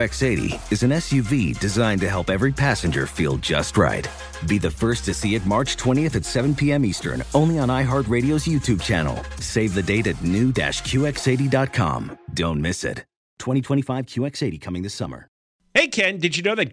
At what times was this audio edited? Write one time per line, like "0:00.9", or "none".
0:15.5